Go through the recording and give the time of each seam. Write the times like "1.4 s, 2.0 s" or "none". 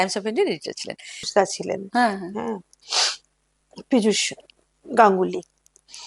1.3 s

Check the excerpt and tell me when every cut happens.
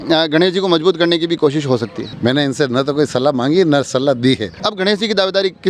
2.1 s, 4.6 s

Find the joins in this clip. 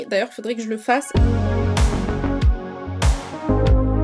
1.1 s

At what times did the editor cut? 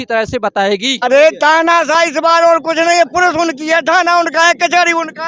0.9 s

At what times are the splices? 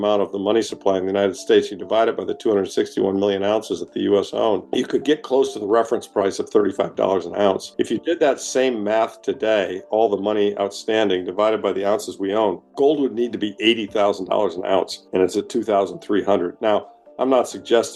4.7 s, 7.7 s, 12.7 s

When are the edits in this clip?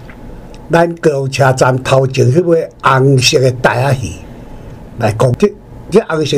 5.4 s

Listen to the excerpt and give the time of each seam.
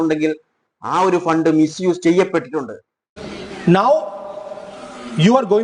3.1 s

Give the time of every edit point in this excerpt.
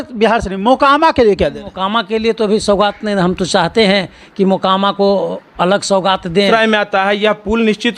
6.5 s

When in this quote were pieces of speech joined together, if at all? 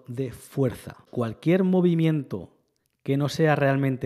1.1 s

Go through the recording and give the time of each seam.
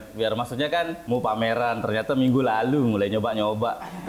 1.0 s

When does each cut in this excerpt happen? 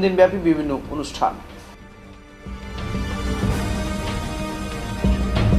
none

